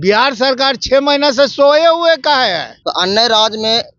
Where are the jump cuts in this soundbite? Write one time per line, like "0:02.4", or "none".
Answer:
0:02.7